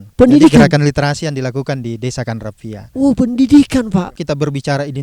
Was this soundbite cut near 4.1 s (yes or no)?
yes